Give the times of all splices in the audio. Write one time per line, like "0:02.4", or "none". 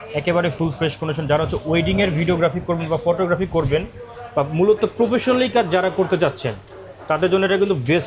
none